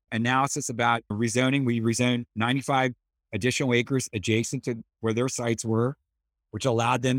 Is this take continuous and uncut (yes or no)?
yes